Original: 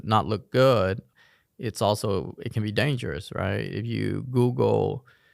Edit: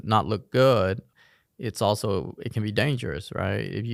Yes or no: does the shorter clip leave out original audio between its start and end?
no